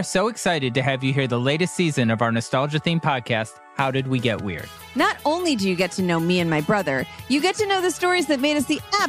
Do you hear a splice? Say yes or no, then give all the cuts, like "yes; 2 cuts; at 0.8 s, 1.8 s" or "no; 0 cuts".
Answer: no; 0 cuts